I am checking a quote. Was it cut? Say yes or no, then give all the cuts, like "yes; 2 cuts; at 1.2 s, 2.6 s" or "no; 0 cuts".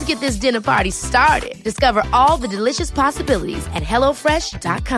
no; 0 cuts